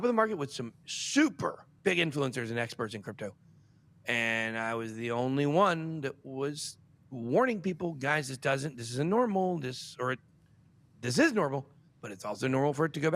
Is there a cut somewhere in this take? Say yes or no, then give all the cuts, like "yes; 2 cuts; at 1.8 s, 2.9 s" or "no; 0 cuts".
yes; 1 cut; at 1.7 s